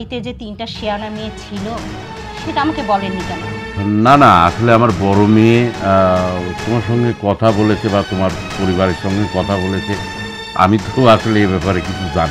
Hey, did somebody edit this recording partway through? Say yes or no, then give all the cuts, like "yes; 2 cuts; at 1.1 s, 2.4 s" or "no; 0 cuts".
no; 0 cuts